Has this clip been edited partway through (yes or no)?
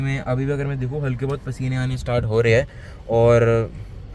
no